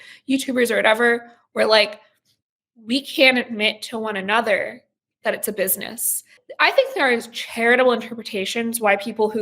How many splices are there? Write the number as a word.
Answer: one